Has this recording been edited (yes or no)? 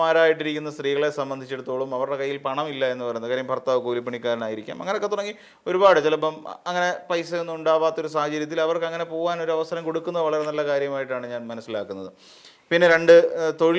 no